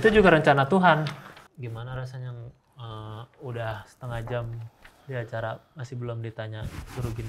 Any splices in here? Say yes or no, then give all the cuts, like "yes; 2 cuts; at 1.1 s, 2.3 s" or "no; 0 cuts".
yes; 1 cut; at 1.5 s